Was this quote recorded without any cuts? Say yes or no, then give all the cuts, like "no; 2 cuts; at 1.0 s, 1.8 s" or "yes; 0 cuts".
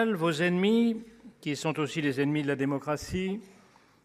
yes; 0 cuts